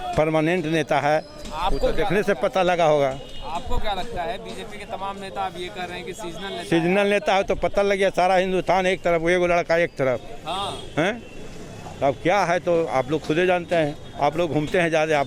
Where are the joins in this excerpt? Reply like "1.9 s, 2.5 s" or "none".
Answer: none